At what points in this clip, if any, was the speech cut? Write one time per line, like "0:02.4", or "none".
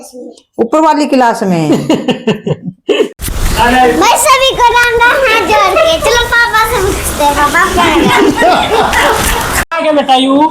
0:03.2
0:09.6